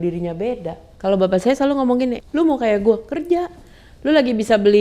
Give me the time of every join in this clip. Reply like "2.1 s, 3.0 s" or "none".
0.9 s, 2.2 s